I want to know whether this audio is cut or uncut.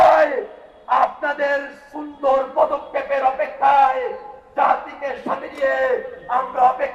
uncut